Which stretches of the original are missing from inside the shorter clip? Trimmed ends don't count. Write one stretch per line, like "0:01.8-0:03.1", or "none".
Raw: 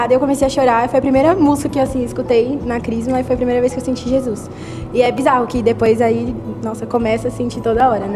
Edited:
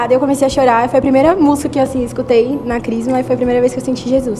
none